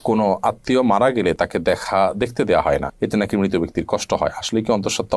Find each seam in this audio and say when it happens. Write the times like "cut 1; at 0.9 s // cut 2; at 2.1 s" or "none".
none